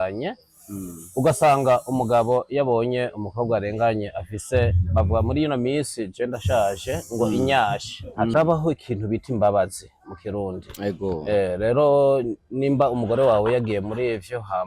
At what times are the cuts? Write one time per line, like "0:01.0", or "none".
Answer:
0:08.3